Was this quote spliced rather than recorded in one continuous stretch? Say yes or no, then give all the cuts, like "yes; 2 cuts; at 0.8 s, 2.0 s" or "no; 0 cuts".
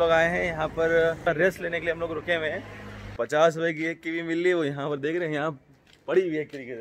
yes; 2 cuts; at 1.3 s, 3.2 s